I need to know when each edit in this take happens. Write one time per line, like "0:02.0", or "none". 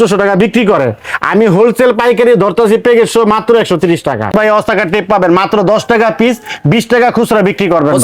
0:04.3